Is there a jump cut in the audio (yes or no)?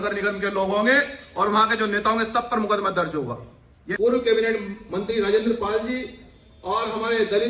yes